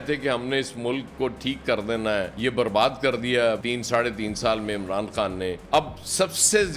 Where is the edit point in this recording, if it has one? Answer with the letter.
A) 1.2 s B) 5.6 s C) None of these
B